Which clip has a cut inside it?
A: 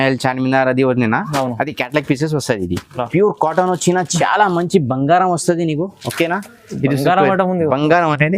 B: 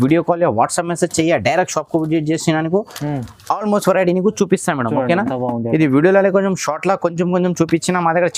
A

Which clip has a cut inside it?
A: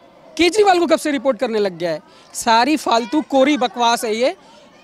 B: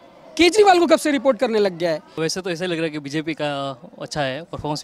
B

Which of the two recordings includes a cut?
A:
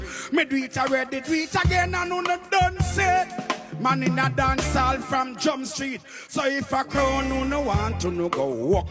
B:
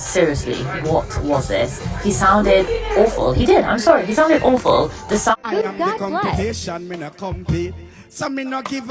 B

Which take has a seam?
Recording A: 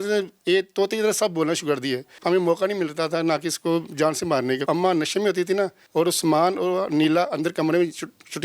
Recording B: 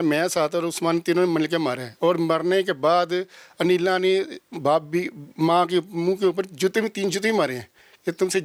A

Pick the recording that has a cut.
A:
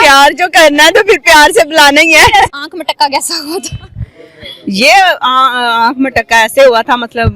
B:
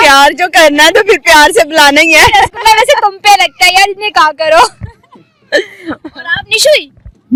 A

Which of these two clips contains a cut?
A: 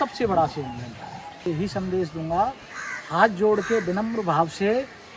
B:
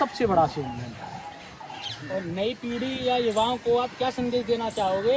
A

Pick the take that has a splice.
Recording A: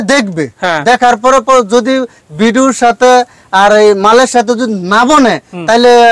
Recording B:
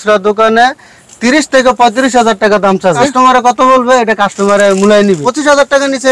B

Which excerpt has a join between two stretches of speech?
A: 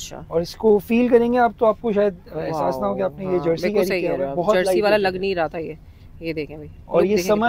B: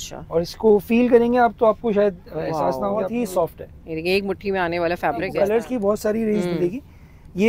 B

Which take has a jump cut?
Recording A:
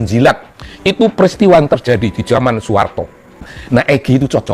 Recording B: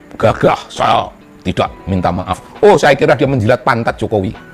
A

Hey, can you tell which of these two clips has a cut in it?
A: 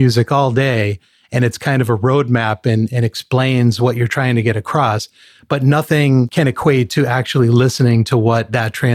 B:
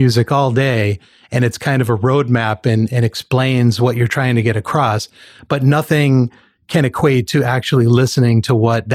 A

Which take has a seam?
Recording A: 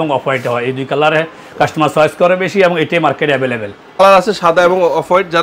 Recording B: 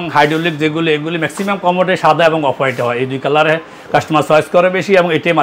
A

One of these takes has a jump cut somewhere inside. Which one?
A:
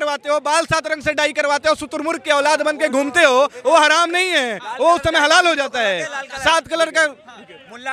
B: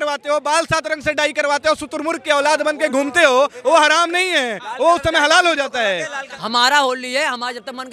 B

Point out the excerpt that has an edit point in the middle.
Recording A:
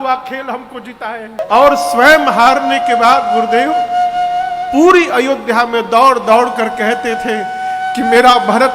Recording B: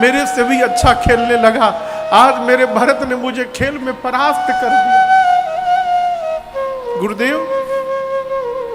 A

